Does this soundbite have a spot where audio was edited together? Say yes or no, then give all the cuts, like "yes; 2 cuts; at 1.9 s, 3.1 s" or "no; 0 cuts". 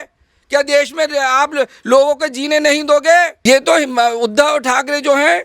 yes; 1 cut; at 3.3 s